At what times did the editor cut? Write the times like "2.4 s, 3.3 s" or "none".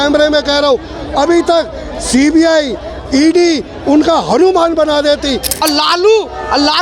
5.6 s

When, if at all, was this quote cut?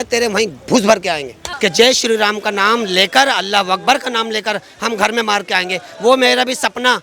1.4 s

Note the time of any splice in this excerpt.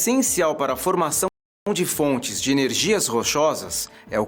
none

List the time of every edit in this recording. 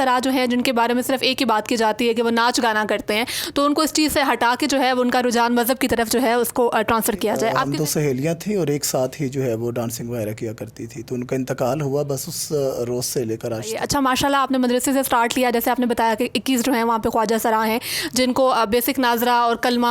7.7 s, 13.8 s

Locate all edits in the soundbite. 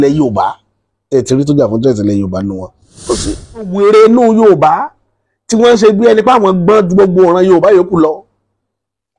3.7 s

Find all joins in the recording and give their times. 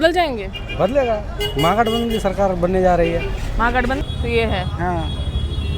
4.0 s

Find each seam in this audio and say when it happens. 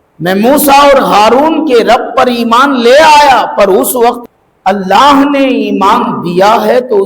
4.3 s

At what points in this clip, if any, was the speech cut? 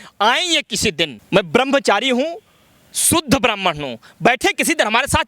1.2 s

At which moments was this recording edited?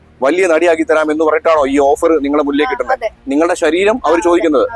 3.2 s

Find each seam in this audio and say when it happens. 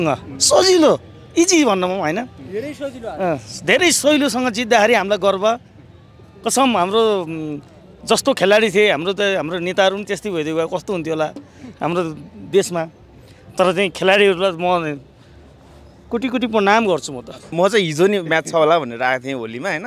17.5 s

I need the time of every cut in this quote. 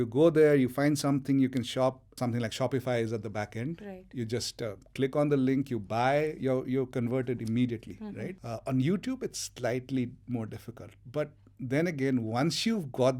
2.1 s, 8.4 s

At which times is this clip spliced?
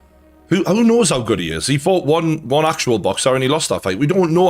none

